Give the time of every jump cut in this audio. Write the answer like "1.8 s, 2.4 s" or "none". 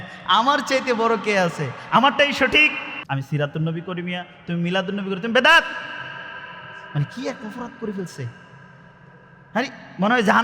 2.9 s